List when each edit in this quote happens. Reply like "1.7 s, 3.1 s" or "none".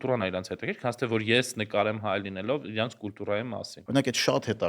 3.7 s